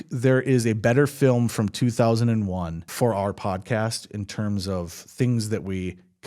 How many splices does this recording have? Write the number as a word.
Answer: one